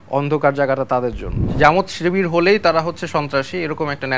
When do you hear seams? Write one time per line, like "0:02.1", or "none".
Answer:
0:01.5